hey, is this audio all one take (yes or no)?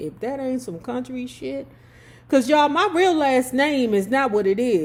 yes